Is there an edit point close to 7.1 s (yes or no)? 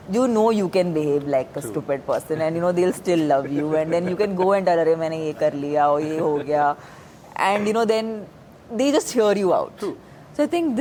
no